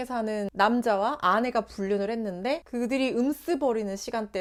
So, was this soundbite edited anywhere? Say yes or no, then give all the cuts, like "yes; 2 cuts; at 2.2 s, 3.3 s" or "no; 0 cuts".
no; 0 cuts